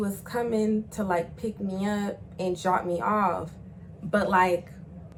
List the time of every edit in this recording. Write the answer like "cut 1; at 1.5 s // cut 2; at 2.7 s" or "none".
none